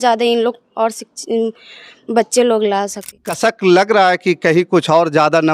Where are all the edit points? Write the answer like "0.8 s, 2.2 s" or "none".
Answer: 3.2 s